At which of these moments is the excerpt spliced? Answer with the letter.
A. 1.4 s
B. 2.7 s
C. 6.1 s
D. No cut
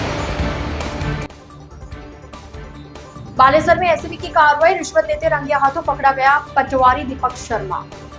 B